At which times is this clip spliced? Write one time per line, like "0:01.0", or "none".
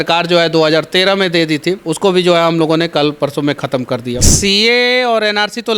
0:01.9
0:04.3